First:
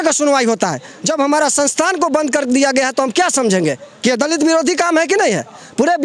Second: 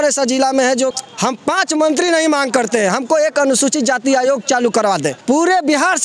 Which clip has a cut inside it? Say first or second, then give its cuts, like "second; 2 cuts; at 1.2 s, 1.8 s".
second; 2 cuts; at 0.9 s, 5.1 s